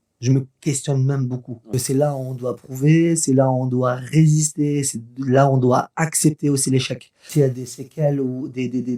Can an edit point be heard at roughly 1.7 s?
yes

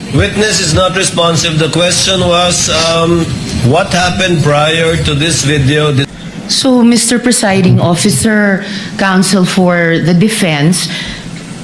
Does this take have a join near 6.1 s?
yes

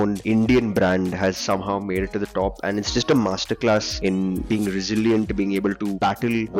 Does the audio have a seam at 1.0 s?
no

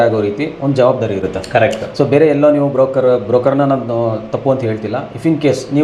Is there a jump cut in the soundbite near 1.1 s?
no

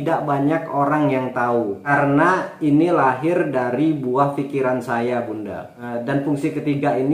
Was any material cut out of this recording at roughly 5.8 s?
no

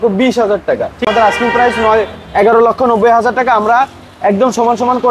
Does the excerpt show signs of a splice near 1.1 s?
yes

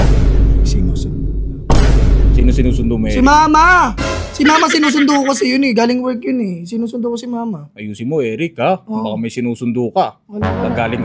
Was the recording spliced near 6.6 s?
no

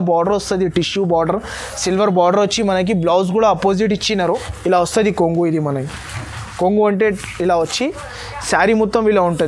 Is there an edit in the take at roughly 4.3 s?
yes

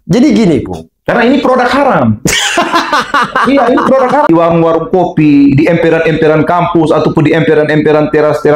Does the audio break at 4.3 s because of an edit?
yes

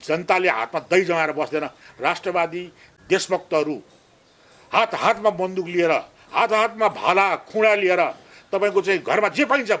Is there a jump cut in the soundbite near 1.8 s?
yes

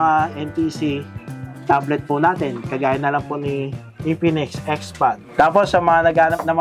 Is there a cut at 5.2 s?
yes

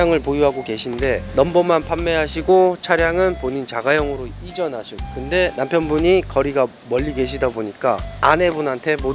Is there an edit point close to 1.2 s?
yes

